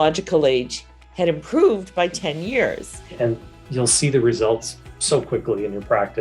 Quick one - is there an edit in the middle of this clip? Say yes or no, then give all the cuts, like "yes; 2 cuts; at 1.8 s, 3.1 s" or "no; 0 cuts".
yes; 1 cut; at 3.1 s